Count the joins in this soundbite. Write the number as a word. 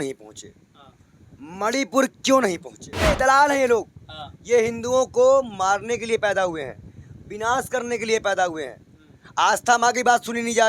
one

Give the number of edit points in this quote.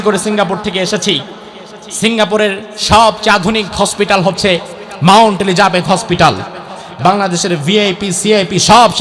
zero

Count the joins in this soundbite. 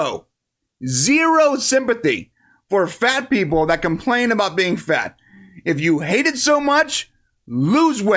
zero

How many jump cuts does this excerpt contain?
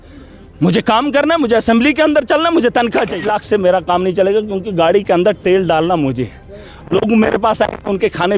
one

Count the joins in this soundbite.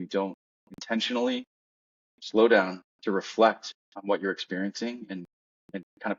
zero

